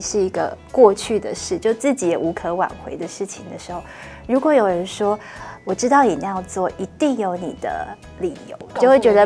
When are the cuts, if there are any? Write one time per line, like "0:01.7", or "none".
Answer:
none